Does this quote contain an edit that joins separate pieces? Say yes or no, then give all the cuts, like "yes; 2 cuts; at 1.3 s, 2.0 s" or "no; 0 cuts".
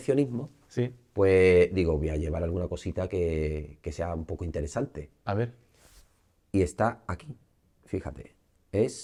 no; 0 cuts